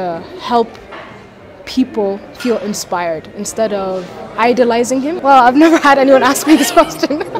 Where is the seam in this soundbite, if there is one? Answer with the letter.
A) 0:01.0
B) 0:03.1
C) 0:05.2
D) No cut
C